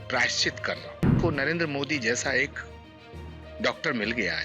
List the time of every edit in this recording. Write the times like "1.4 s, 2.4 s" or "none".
1.1 s